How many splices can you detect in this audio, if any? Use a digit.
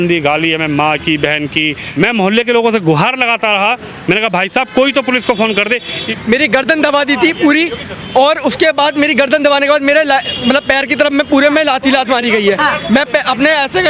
2